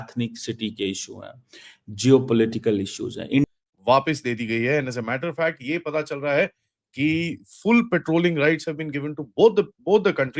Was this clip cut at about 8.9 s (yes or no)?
no